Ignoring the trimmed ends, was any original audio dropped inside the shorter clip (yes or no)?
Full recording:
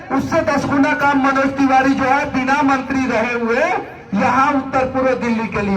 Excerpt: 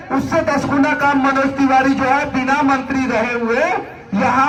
no